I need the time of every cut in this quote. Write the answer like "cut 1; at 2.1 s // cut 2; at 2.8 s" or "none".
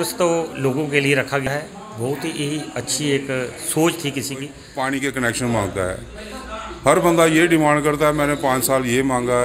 cut 1; at 1.5 s // cut 2; at 4.6 s